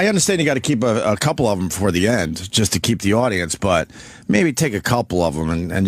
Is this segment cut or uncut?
uncut